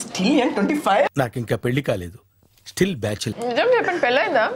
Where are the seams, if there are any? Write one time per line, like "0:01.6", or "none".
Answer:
0:01.1
0:03.3